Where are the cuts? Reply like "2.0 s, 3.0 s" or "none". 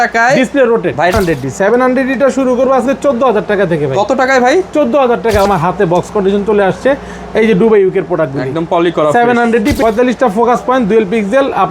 1.1 s, 5.5 s, 9.8 s

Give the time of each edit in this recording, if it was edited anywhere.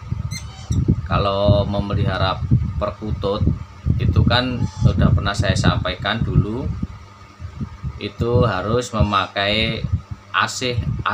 none

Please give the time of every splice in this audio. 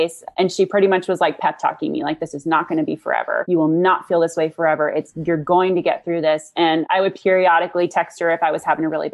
3.4 s, 6.9 s

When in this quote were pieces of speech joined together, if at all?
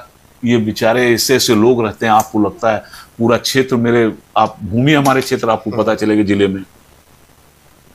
none

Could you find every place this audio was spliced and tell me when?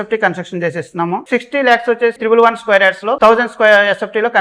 1.2 s, 2.2 s, 3.1 s

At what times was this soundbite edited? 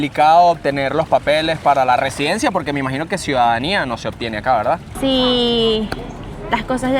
4.9 s

